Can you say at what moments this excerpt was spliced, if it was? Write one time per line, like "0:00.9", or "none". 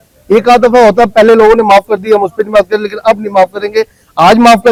none